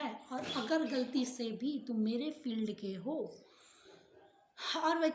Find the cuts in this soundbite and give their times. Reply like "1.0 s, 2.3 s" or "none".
none